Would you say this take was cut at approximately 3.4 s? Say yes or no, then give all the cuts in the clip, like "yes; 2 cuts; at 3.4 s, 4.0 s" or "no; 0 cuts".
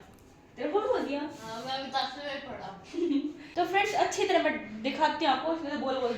yes; 1 cut; at 3.4 s